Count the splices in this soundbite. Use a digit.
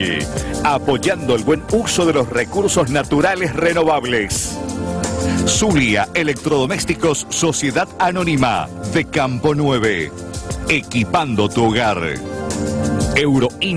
1